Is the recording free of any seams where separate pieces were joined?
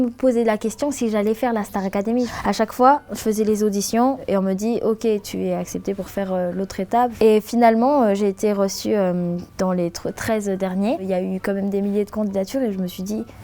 no; 3 cuts; at 5.3 s, 7.1 s, 11.0 s

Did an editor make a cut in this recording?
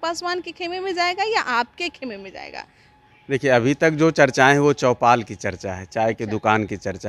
no; 0 cuts

